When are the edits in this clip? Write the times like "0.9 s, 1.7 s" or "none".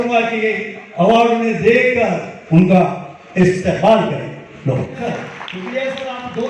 5.0 s

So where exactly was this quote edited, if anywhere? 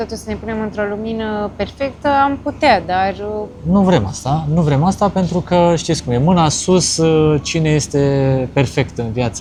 none

